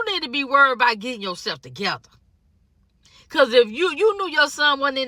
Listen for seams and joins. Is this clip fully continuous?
yes; 0 cuts

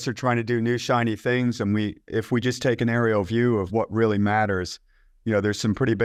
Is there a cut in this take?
no; 0 cuts

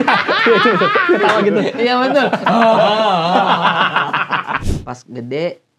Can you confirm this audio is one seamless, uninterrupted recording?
no; 1 cut; at 4.6 s

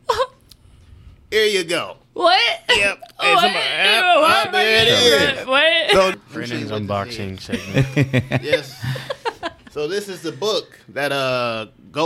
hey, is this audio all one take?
no; 1 cut; at 6.1 s

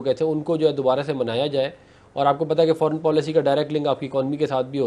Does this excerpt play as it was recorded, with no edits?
yes; 0 cuts

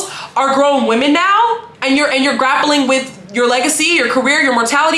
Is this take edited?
no; 0 cuts

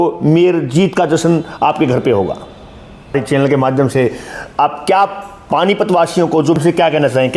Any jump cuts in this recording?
yes; 2 cuts; at 3.1 s, 6.3 s

